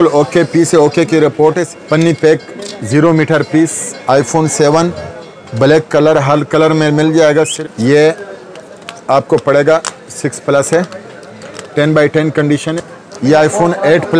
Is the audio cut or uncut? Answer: cut